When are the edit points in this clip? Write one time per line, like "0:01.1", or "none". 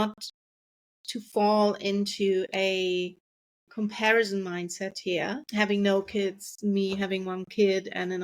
0:05.4